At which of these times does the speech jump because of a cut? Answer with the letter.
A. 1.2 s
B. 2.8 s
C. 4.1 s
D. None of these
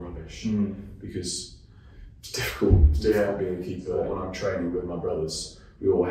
C